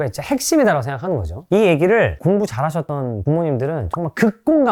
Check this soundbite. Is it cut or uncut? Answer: uncut